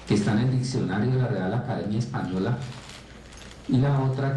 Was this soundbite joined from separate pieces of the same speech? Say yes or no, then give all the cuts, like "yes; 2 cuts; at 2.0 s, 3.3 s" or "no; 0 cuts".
no; 0 cuts